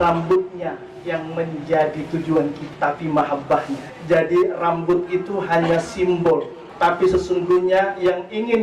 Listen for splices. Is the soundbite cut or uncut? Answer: cut